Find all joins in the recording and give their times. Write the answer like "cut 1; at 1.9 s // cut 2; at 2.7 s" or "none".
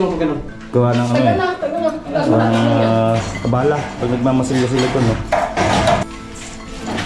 cut 1; at 6.1 s